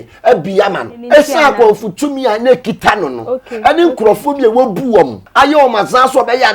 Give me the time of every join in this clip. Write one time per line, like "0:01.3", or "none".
0:00.9
0:05.2

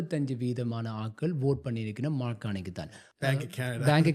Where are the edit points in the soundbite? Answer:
0:03.0

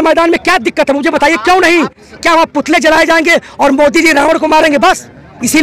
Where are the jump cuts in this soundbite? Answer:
none

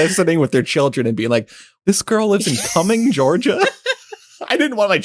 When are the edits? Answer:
0:01.8

